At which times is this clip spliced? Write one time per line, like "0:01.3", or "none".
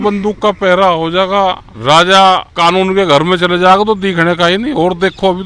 0:01.7
0:02.5

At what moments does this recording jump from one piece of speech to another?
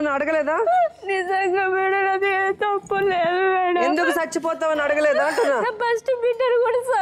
none

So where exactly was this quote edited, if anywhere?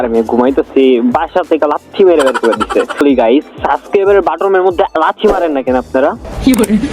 0:03.0

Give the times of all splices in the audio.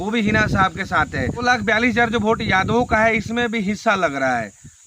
0:01.4

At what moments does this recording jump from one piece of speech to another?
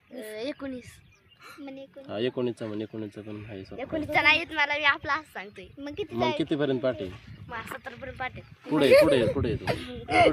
none

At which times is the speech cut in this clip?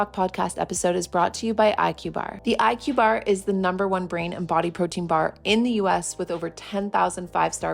0:02.3

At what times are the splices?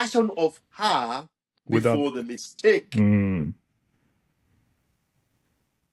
none

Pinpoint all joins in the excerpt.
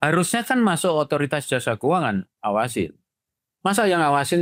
none

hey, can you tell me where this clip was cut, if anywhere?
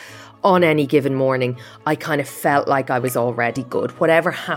0:03.6

